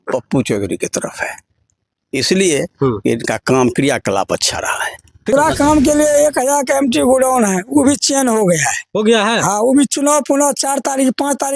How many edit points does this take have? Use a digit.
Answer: 1